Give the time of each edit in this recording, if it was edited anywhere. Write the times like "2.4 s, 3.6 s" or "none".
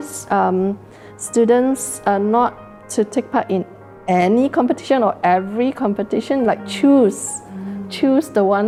none